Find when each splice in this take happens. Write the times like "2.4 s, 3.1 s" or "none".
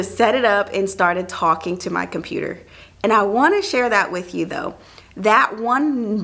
none

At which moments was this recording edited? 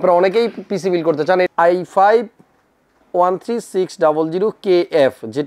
1.5 s

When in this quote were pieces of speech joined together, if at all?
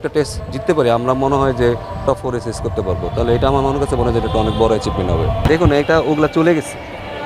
none

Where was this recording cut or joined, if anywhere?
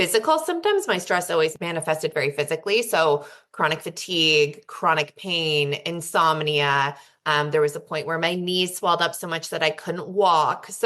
1.6 s

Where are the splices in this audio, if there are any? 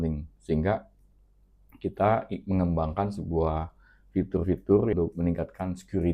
4.9 s

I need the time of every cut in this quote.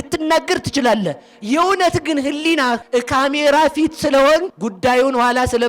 2.8 s, 4.6 s

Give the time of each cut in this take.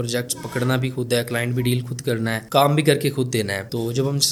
none

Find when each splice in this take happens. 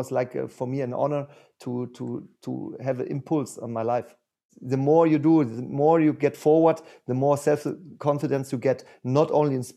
4.5 s

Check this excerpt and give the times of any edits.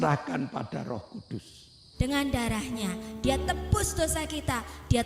1.8 s

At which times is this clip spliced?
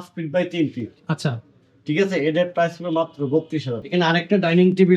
3.8 s

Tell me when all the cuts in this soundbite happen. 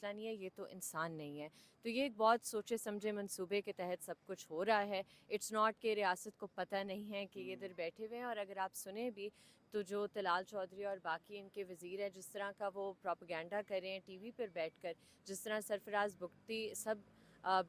none

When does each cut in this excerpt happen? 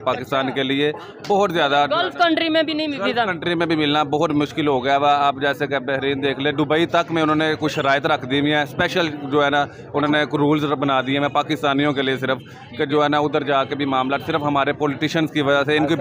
none

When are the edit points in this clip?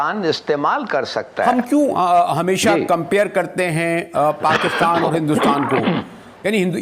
1.5 s

